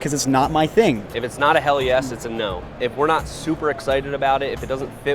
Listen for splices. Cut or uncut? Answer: cut